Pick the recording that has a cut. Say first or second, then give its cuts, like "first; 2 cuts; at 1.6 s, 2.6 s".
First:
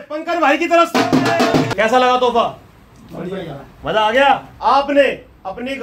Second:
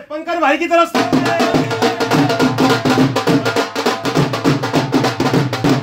first; 2 cuts; at 1.7 s, 4.5 s